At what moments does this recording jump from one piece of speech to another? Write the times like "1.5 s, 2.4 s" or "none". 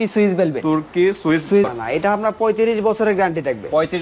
1.7 s